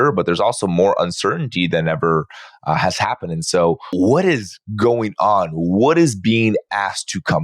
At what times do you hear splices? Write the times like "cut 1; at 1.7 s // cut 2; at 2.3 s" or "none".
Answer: cut 1; at 3.9 s